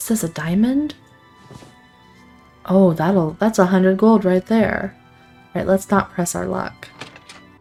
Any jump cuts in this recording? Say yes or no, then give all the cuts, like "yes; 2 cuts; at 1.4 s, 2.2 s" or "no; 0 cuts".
no; 0 cuts